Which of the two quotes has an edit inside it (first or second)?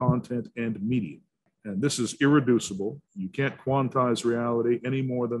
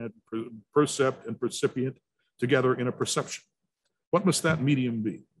first